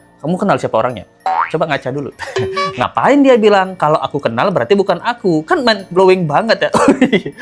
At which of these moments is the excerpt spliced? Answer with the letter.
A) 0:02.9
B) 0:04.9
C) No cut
A